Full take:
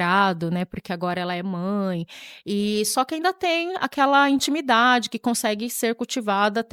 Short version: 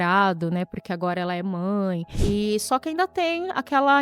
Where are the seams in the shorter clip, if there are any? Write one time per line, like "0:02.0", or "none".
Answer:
0:02.1